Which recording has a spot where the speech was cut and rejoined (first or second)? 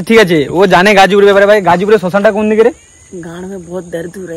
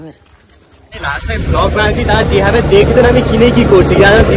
second